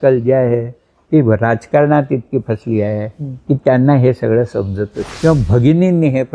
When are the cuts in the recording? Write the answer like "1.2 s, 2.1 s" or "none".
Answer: 5.0 s